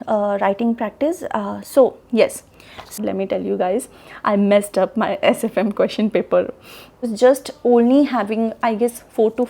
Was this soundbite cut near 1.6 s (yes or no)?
no